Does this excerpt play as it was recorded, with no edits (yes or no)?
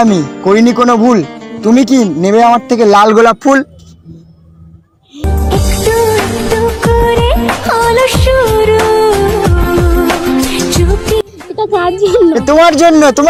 yes